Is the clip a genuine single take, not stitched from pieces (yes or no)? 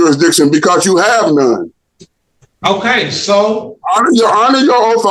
yes